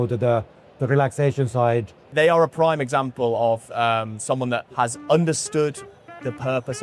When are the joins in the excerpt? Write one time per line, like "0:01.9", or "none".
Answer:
0:02.1
0:04.7